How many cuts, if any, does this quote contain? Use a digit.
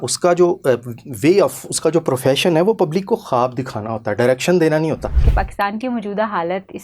1